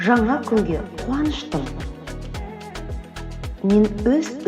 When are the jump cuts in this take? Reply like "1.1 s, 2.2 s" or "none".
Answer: 1.7 s, 3.5 s